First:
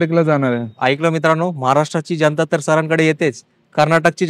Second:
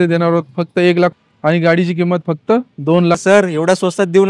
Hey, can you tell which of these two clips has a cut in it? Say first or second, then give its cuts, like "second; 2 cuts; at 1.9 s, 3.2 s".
second; 2 cuts; at 1.1 s, 3.2 s